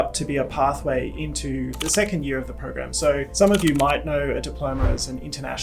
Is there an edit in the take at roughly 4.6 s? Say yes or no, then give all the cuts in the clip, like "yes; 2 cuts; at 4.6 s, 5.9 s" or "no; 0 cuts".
no; 2 cuts; at 1.8 s, 3.3 s